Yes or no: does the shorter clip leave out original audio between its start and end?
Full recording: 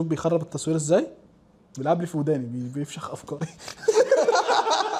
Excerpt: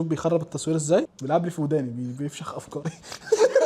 yes